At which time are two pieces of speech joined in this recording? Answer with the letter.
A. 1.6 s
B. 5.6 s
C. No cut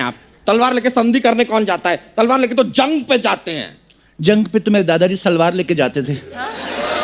C